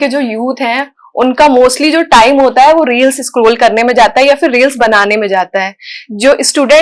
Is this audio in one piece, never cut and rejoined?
yes; 0 cuts

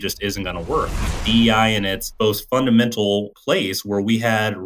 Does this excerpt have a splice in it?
yes; 3 cuts; at 1.2 s, 2.0 s, 3.3 s

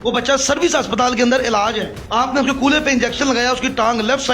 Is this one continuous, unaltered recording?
no; 1 cut; at 2.0 s

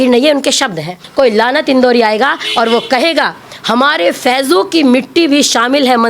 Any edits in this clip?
yes; 1 cut; at 1.0 s

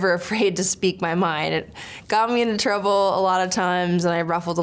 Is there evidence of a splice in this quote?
no; 0 cuts

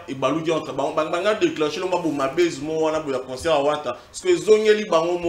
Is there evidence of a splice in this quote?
no; 0 cuts

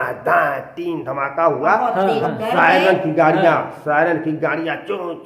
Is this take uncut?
no; 1 cut; at 2.3 s

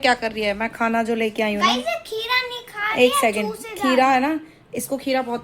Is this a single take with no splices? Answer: yes; 0 cuts

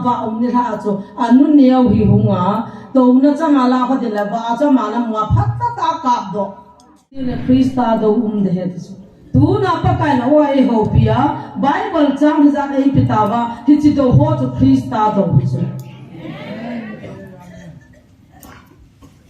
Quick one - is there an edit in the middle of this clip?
yes; 1 cut; at 7.4 s

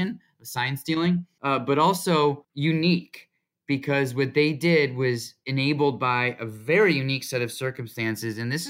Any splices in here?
yes; 3 cuts; at 1.3 s, 2.5 s, 5.3 s

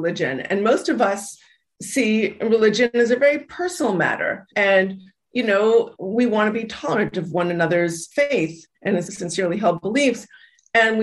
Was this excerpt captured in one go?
no; 3 cuts; at 4.5 s, 8.0 s, 9.1 s

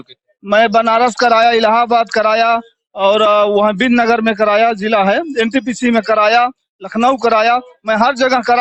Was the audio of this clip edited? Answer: no; 0 cuts

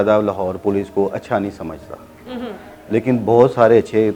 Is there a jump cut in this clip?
no; 0 cuts

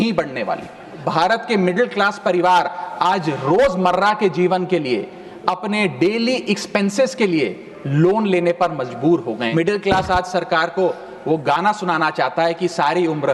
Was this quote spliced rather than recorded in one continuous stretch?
yes; 2 cuts; at 1.0 s, 9.5 s

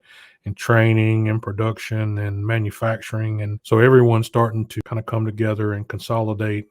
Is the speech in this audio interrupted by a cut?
yes; 2 cuts; at 3.5 s, 4.7 s

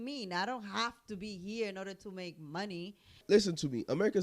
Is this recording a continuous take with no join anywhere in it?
no; 1 cut; at 3.2 s

